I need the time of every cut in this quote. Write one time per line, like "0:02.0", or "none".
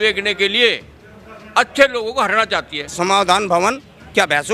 0:02.9

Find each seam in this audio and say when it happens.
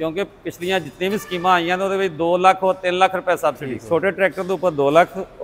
0:03.7

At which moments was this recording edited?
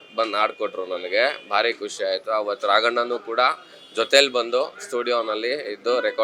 none

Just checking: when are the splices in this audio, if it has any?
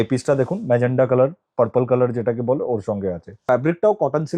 0:03.4

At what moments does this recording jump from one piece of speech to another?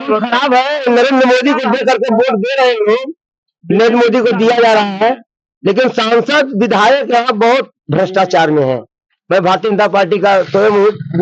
none

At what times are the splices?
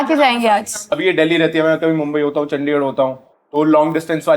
0:00.9

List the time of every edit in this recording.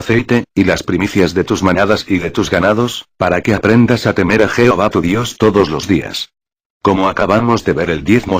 0:05.2

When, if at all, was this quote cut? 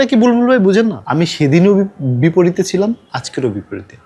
0:01.0

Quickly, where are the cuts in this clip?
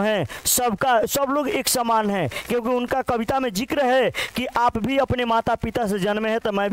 none

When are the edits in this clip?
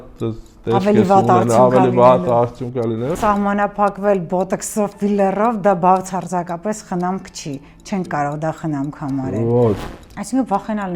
0:03.2
0:09.8

